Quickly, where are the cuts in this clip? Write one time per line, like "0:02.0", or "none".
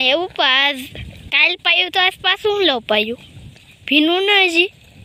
none